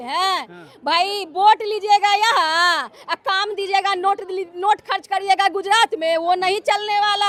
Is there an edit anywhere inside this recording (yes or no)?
no